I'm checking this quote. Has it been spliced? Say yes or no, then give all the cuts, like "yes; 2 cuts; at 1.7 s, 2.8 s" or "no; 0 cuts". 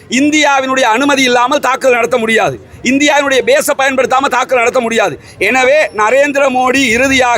no; 0 cuts